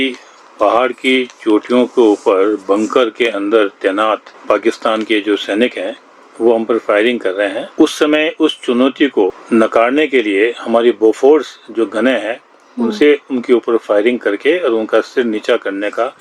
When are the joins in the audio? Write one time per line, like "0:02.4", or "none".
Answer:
0:04.3
0:07.6
0:09.4